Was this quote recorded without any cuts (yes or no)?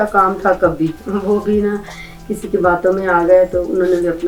yes